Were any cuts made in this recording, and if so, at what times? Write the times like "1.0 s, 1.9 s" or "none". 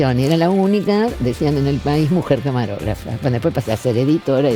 none